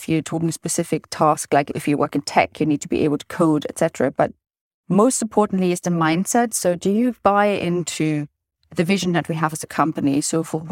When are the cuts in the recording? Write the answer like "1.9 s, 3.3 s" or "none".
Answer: 1.8 s